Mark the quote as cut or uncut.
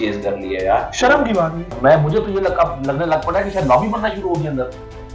cut